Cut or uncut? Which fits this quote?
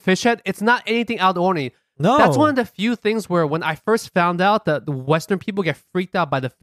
uncut